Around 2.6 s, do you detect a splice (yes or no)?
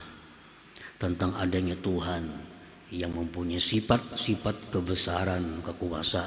no